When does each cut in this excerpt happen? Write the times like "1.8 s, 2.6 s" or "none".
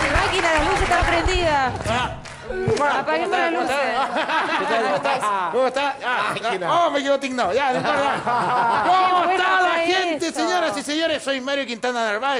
3.2 s